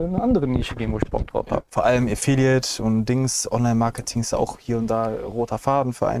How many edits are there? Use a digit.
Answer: 1